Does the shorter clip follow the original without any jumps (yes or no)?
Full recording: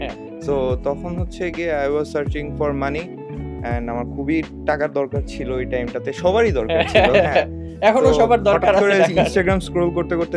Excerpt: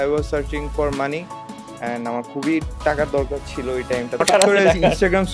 no